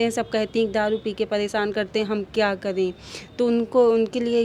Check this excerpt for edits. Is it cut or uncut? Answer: uncut